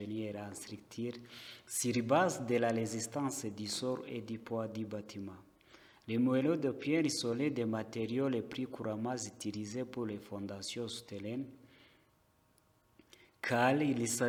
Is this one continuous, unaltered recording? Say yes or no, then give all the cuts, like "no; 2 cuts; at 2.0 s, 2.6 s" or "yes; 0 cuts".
yes; 0 cuts